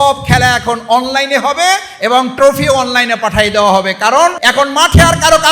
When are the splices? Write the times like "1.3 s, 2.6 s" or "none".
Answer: 4.4 s

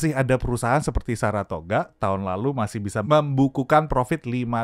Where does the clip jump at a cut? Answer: 3.0 s

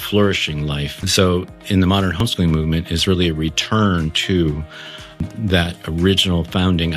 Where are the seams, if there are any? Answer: 0.9 s, 2.2 s, 5.2 s

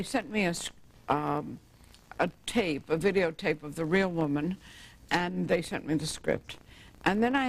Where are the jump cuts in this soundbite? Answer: 2.6 s

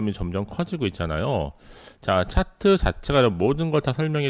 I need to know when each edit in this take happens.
none

